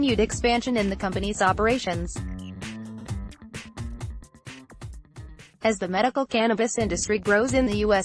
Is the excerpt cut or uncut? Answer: uncut